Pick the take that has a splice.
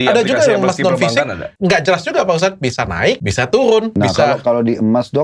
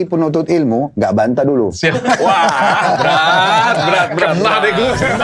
first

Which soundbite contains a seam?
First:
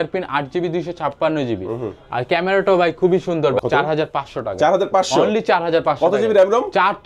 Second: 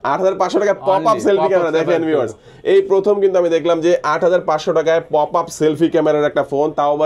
first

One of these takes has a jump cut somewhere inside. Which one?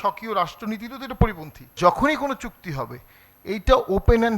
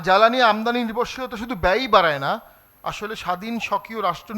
first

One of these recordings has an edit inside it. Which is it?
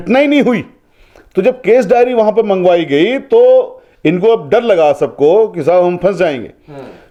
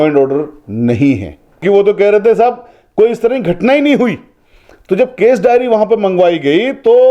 second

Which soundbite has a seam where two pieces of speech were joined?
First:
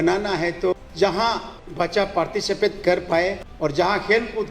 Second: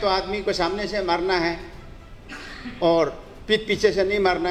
first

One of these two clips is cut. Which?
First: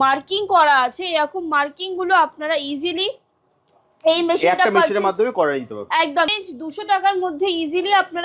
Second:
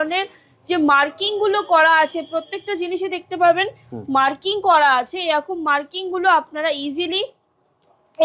first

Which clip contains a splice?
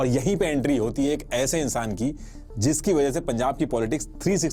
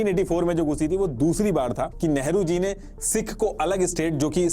second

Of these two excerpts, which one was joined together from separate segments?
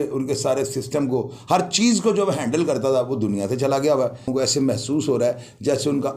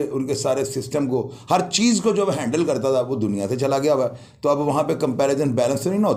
first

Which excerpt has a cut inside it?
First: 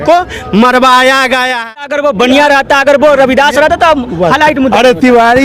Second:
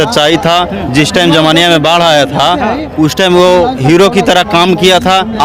first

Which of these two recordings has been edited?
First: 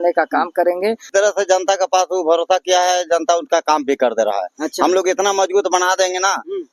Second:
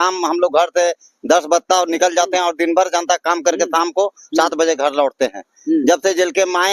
first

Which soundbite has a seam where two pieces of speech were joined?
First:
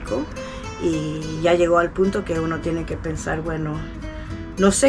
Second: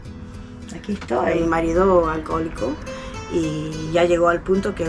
second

